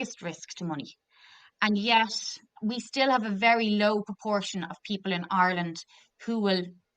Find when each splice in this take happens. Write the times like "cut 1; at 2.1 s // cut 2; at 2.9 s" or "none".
cut 1; at 2.5 s